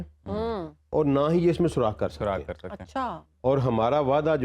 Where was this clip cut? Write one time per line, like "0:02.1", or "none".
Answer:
0:03.3